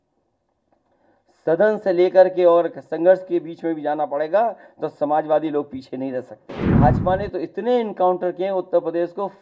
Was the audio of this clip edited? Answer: yes; 1 cut; at 6.7 s

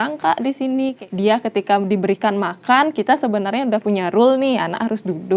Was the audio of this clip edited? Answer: yes; 1 cut; at 1.0 s

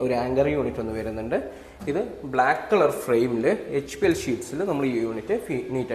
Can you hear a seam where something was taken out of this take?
no; 0 cuts

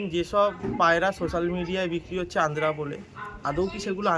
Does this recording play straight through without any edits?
yes; 0 cuts

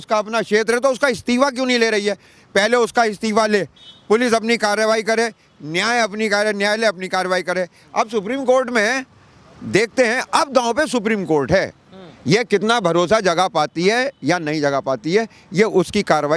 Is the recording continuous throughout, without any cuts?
yes; 0 cuts

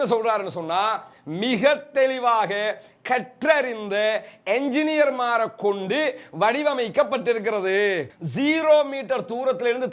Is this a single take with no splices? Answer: no; 1 cut; at 8.1 s

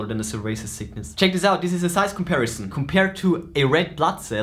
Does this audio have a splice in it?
yes; 2 cuts; at 1.0 s, 2.7 s

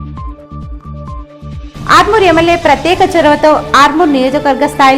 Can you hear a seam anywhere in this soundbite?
yes; 1 cut; at 1.6 s

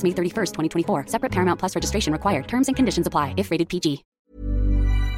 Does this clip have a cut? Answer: yes; 1 cut; at 4.1 s

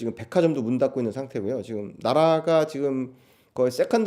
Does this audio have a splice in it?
no; 0 cuts

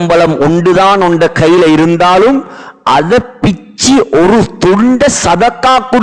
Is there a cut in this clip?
no; 0 cuts

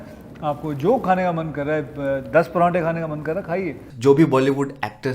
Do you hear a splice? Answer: yes; 1 cut; at 3.9 s

